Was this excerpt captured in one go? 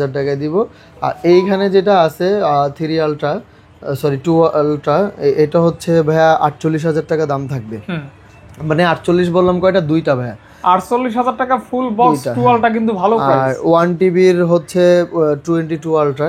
yes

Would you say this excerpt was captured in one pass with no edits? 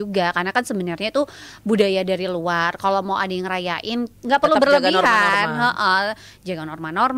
no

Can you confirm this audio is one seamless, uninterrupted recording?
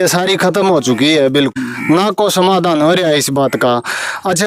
no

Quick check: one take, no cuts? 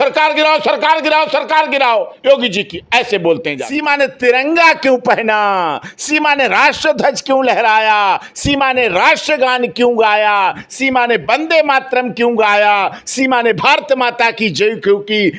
no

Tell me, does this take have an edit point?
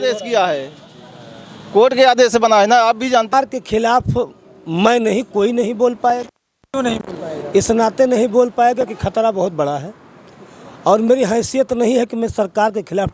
yes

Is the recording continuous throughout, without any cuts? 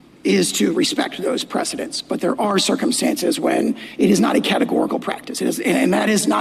yes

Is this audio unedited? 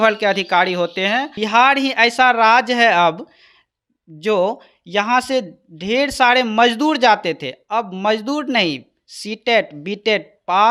no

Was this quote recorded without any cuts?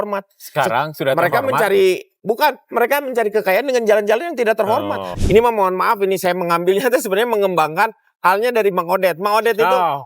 no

